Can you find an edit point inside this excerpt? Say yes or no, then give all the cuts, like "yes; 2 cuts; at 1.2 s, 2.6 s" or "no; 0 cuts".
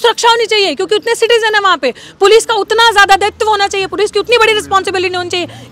no; 0 cuts